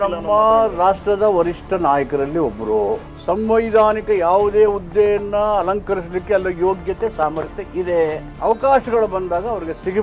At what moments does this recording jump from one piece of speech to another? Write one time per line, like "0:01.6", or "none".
0:03.1
0:08.3